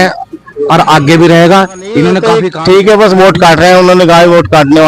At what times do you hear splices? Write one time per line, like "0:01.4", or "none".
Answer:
0:02.4